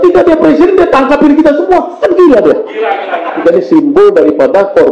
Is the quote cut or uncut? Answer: cut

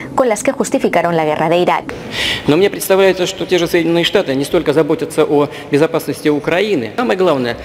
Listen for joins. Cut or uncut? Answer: cut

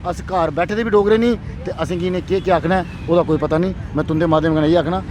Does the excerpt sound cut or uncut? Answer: uncut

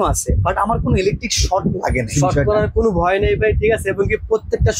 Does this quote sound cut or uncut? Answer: cut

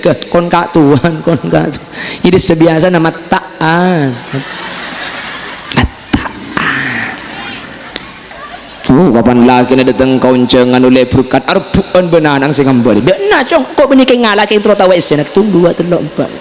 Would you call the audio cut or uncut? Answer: cut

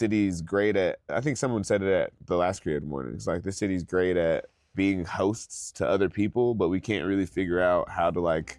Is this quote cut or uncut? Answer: cut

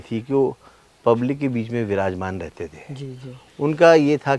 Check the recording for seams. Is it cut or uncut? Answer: uncut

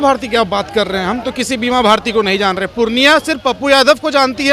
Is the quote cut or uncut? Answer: uncut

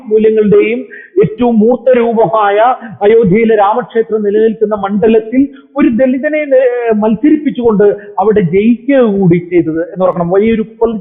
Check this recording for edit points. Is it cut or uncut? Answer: uncut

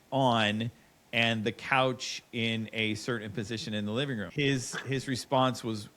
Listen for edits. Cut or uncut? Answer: cut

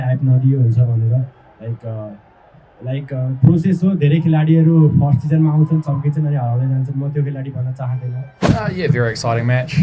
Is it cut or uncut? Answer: cut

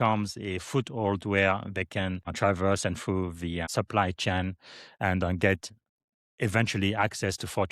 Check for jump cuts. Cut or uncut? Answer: cut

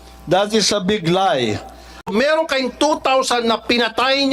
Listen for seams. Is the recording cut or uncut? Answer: cut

